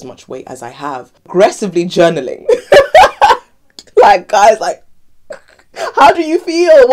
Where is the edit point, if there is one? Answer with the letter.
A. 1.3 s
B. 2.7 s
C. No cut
A